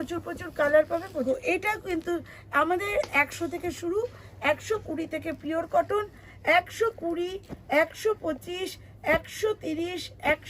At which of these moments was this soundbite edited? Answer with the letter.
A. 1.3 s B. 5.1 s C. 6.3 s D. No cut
A